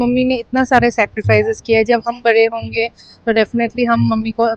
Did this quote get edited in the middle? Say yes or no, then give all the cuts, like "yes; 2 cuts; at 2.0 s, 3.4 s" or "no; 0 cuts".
no; 0 cuts